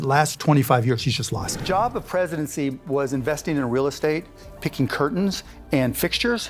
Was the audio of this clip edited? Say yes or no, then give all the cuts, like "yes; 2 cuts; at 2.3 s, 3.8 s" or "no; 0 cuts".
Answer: yes; 1 cut; at 1.5 s